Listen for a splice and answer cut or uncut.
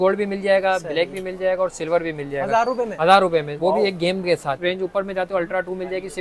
uncut